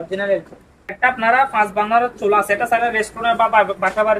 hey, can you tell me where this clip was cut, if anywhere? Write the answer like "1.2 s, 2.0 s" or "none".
1.2 s